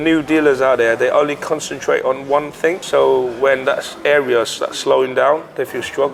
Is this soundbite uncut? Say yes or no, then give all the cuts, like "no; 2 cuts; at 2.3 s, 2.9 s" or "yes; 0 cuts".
yes; 0 cuts